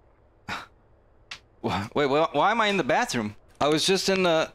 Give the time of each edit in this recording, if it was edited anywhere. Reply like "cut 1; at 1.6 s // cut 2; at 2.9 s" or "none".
cut 1; at 3.4 s